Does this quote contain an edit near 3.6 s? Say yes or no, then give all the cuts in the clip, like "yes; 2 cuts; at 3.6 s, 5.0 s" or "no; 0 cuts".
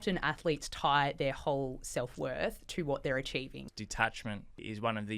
yes; 1 cut; at 3.6 s